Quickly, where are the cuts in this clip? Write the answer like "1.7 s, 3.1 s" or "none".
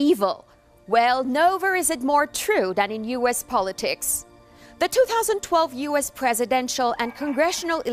none